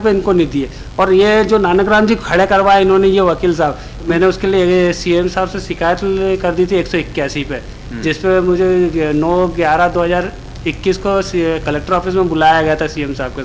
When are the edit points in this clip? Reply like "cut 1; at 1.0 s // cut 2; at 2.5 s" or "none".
cut 1; at 3.9 s